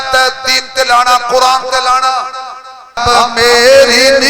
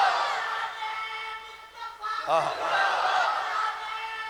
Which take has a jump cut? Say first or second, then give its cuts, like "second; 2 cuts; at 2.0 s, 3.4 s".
first; 1 cut; at 3.0 s